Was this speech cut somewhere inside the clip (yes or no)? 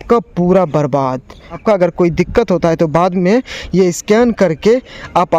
yes